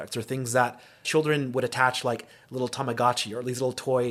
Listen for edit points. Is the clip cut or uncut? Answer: cut